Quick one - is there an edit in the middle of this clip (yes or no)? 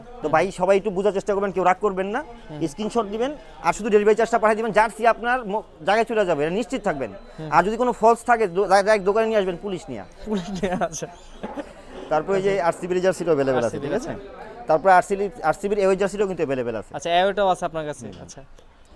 no